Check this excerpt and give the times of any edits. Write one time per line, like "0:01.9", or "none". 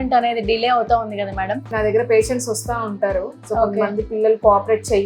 0:01.6